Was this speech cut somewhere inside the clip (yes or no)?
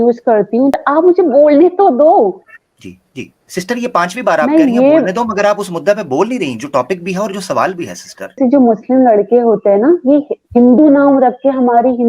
yes